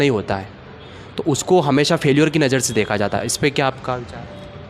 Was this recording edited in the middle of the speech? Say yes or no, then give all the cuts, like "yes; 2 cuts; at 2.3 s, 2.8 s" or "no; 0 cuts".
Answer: no; 0 cuts